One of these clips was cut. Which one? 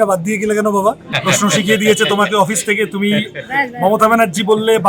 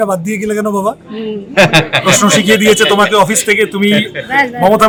first; 1 cut; at 1.1 s

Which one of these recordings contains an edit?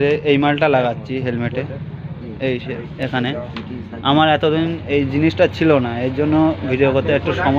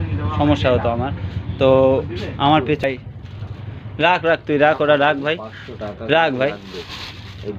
second; 1 cut; at 2.8 s

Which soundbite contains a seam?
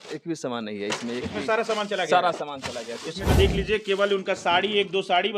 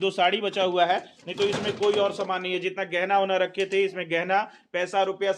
first; 1 cut; at 3.3 s

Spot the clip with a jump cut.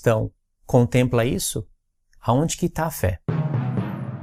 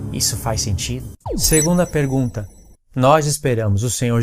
second; 1 cut; at 1.1 s

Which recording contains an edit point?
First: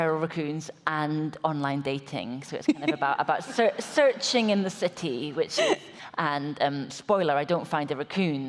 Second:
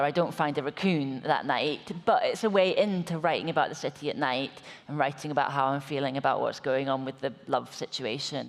first; 1 cut; at 6.0 s

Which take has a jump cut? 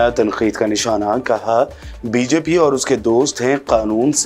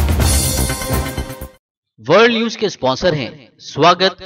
second; 1 cut; at 1.5 s

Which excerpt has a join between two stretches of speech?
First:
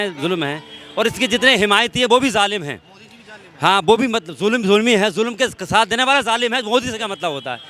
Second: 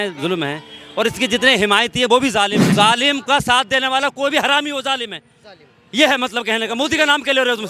second; 1 cut; at 2.6 s

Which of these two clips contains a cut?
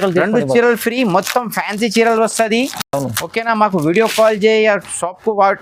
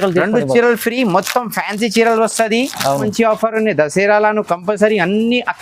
second; 1 cut; at 3.0 s

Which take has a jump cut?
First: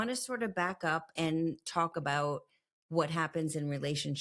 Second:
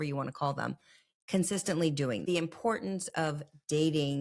second; 1 cut; at 2.2 s

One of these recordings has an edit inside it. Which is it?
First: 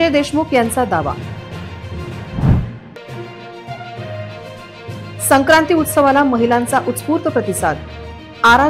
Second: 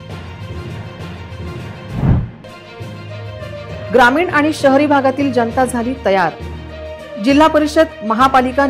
second; 1 cut; at 1.7 s

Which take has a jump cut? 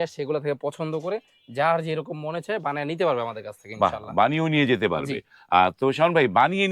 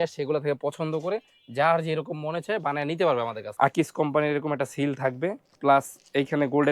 second; 2 cuts; at 3.4 s, 5.5 s

